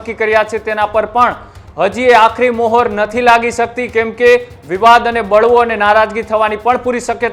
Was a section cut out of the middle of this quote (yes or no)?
no